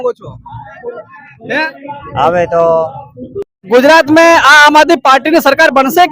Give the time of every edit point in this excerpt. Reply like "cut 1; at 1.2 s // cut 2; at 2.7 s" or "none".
cut 1; at 3.7 s